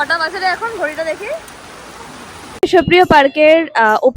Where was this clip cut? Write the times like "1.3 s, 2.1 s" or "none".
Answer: 2.6 s